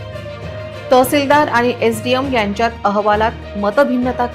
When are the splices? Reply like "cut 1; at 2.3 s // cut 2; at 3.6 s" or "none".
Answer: cut 1; at 0.9 s